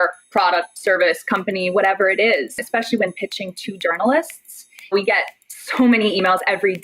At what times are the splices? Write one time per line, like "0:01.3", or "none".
0:02.6
0:04.9